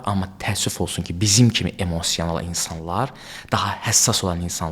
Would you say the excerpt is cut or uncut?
uncut